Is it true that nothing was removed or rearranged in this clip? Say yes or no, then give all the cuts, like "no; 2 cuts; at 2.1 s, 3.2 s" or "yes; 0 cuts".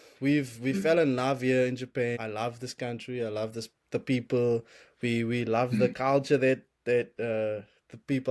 no; 1 cut; at 2.2 s